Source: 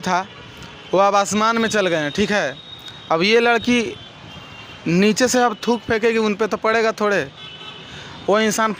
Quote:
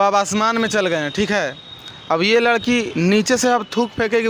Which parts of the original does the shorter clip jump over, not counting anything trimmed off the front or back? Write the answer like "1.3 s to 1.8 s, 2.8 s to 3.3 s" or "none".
3.9 s to 4.8 s